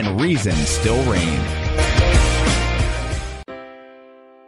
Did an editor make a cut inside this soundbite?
yes; 1 cut; at 3.4 s

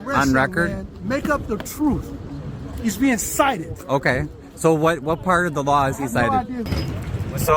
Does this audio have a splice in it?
yes; 1 cut; at 6.7 s

